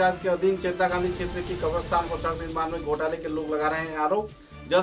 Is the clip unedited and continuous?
yes; 0 cuts

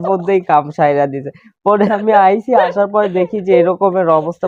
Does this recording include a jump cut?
no; 0 cuts

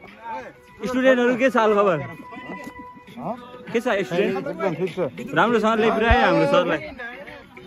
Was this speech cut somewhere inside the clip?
no; 0 cuts

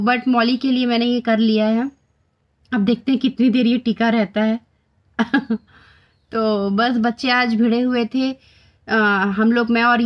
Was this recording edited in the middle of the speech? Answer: no; 0 cuts

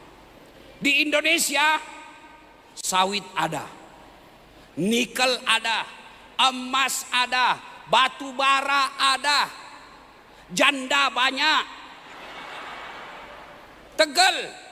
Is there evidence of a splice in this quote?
no; 0 cuts

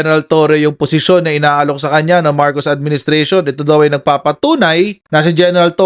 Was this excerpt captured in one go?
yes; 0 cuts

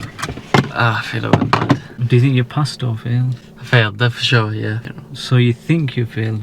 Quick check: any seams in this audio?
yes; 2 cuts; at 1.9 s, 4.8 s

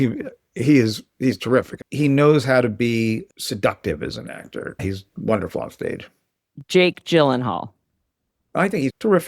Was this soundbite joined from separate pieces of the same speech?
yes; 2 cuts; at 1.8 s, 4.6 s

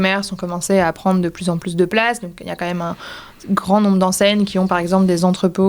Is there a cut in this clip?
no; 0 cuts

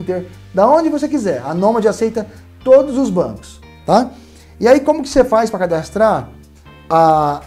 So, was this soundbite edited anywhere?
no; 0 cuts

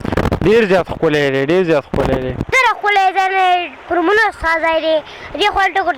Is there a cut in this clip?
yes; 1 cut; at 2.4 s

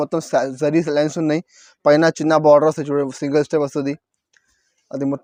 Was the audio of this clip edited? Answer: no; 0 cuts

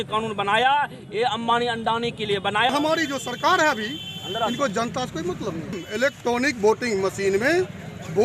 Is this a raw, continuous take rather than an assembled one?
no; 2 cuts; at 2.7 s, 5.8 s

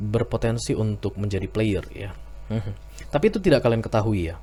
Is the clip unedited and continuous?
yes; 0 cuts

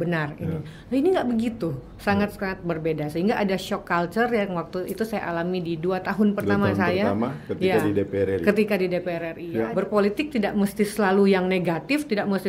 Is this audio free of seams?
no; 1 cut; at 9.4 s

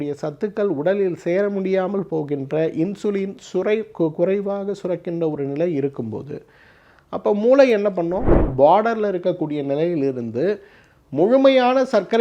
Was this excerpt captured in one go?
no; 1 cut; at 8.3 s

